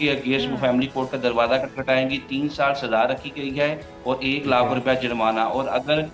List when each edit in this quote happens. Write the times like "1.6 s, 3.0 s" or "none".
none